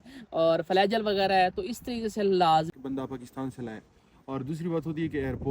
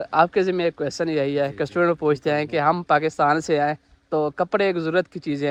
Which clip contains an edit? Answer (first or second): first